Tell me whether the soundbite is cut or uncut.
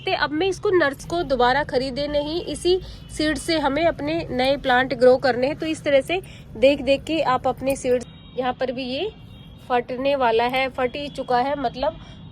cut